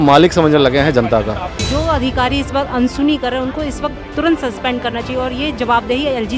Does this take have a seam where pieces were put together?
yes; 1 cut; at 1.5 s

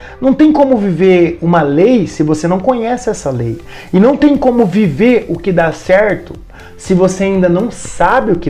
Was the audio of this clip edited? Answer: no; 0 cuts

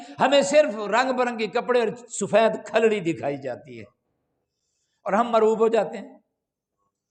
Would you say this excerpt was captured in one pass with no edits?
yes; 0 cuts

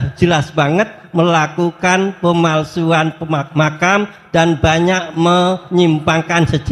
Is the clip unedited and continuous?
yes; 0 cuts

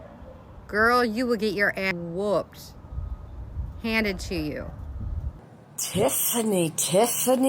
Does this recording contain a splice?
yes; 2 cuts; at 1.9 s, 5.3 s

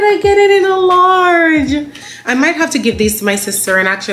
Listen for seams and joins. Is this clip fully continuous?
yes; 0 cuts

